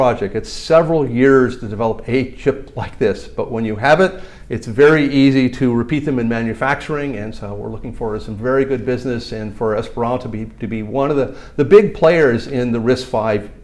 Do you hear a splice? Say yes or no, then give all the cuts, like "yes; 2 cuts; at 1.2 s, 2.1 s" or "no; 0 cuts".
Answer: no; 0 cuts